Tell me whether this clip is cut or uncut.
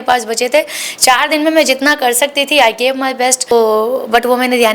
cut